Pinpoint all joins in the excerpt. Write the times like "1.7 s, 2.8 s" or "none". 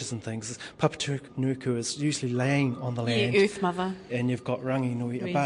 4.0 s